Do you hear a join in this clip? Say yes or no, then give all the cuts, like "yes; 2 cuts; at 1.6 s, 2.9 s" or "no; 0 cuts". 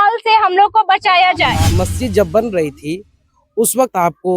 yes; 1 cut; at 1.8 s